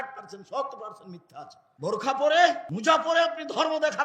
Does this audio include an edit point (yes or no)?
yes